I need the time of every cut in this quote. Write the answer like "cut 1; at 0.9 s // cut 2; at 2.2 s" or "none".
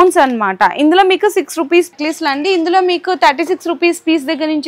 cut 1; at 1.9 s